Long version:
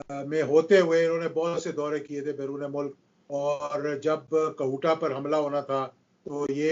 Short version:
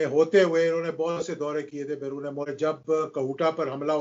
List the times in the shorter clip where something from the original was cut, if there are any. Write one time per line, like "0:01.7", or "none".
0:02.5